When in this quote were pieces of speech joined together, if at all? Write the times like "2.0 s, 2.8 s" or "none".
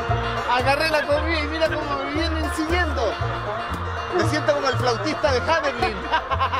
none